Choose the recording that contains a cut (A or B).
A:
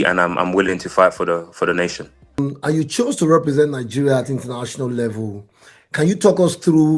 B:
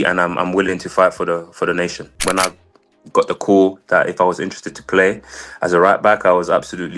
B